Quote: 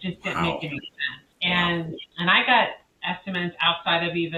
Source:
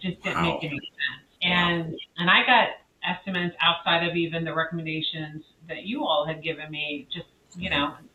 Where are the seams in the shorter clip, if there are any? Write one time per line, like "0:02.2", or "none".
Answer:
none